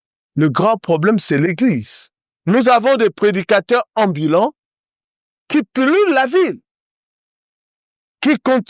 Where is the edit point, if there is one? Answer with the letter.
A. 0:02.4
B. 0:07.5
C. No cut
A